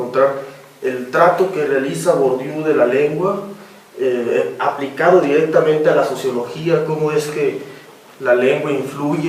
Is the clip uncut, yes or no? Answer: yes